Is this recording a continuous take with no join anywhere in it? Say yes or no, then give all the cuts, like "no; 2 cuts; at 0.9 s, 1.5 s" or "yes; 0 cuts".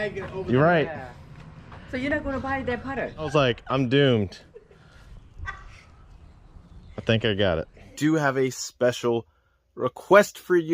no; 2 cuts; at 3.3 s, 7.9 s